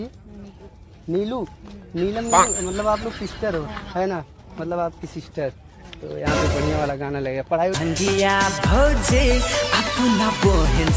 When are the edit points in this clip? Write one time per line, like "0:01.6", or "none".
none